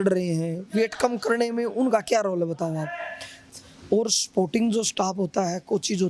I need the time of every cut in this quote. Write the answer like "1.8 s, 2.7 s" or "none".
3.3 s